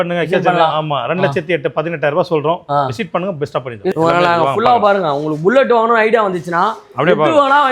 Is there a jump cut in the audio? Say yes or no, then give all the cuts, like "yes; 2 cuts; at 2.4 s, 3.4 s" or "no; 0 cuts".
yes; 1 cut; at 3.9 s